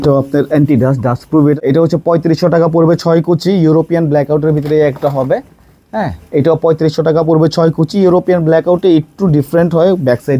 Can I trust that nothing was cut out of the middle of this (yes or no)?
no